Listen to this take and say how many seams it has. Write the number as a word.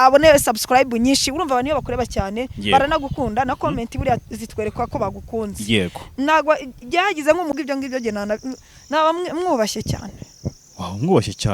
one